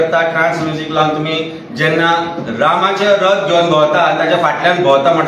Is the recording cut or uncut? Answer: uncut